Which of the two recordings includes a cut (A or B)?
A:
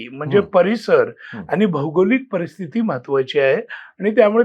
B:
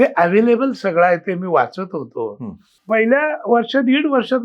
B